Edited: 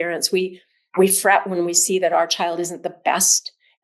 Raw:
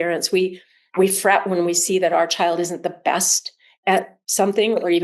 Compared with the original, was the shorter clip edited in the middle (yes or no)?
no